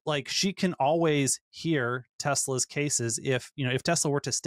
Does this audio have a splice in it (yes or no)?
no